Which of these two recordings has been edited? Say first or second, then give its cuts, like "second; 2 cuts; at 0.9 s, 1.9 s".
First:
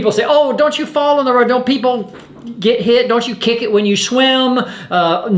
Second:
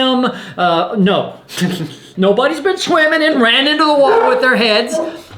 second; 1 cut; at 2.1 s